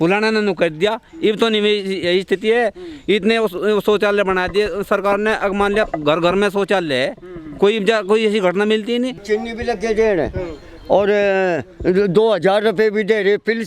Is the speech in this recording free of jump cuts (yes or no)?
no